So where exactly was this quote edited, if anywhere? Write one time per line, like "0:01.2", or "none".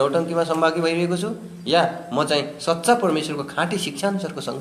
none